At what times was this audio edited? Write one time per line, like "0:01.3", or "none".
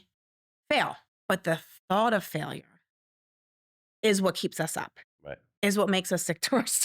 0:01.1